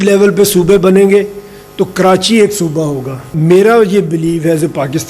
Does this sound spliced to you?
yes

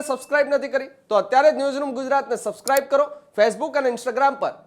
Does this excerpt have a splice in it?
no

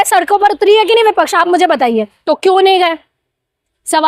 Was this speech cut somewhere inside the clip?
yes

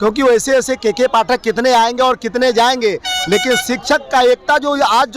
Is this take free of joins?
yes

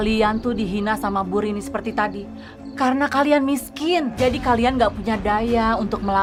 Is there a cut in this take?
no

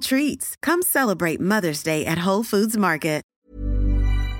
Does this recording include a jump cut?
yes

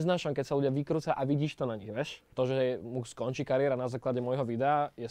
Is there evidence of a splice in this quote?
yes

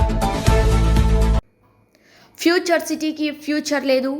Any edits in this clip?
yes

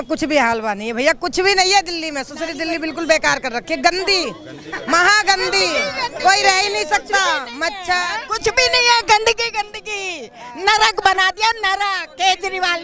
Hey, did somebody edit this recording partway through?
no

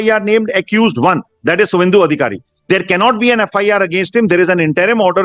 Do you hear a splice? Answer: no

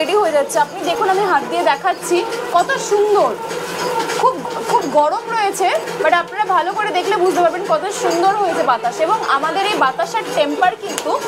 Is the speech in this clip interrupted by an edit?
no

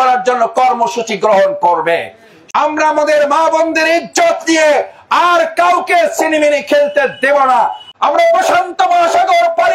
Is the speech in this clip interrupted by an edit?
yes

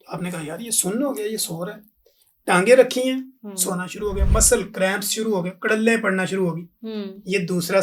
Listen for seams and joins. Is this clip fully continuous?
yes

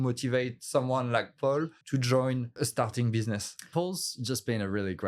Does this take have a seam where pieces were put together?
yes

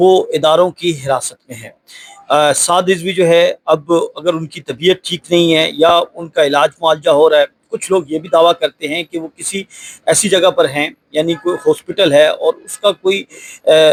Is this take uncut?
yes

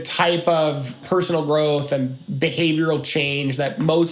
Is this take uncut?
no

